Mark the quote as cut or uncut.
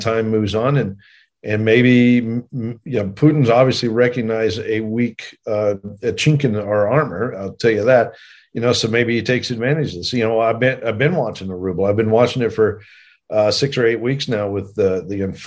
uncut